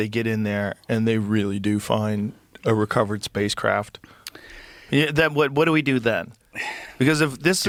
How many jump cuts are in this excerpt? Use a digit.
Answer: 0